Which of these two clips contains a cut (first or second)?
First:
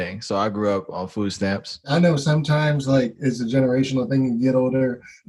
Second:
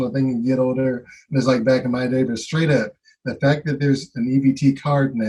first